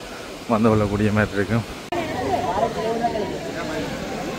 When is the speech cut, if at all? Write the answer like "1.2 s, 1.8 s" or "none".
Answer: 1.8 s